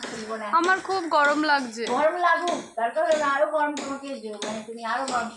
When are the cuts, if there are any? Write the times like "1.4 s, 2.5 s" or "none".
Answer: none

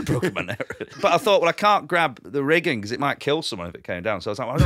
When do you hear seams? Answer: 0.9 s, 2.2 s, 3.2 s

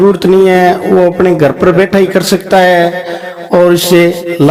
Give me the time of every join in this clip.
none

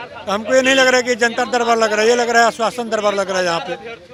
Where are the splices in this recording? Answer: none

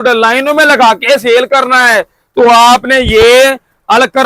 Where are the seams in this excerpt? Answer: none

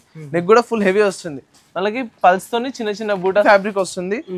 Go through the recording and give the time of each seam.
3.4 s

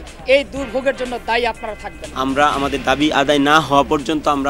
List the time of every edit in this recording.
2.0 s

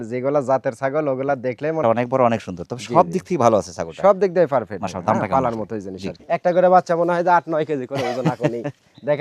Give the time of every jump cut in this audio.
1.8 s, 6.2 s

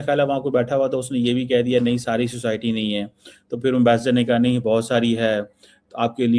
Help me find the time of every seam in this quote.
none

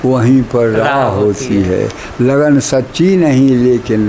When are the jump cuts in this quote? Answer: none

